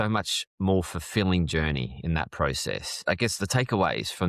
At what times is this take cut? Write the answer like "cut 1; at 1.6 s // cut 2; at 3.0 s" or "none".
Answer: cut 1; at 2.9 s